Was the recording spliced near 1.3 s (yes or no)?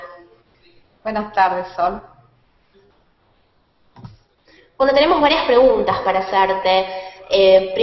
yes